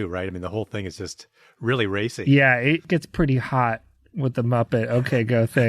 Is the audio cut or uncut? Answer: cut